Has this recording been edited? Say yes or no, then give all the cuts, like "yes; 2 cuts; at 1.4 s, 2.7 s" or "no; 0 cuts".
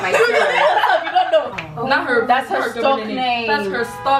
yes; 1 cut; at 1.6 s